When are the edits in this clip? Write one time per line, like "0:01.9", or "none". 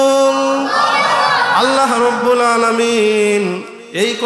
none

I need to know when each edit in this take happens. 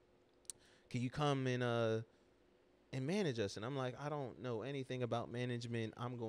none

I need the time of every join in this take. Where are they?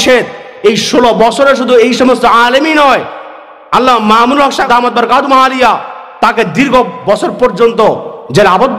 0:04.6

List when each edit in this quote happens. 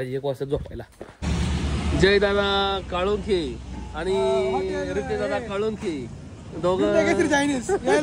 0:01.2

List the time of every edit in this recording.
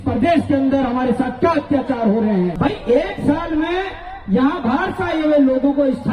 0:02.5

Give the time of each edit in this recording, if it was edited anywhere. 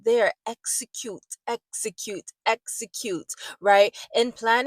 none

